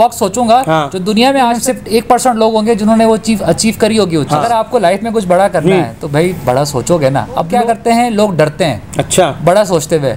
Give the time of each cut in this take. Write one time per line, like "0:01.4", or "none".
0:01.4
0:04.7
0:07.6